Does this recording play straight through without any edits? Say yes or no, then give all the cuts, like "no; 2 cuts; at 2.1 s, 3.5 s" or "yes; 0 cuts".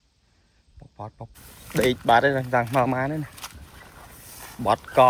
no; 1 cut; at 1.3 s